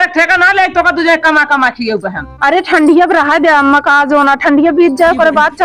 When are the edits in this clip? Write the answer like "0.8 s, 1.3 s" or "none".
none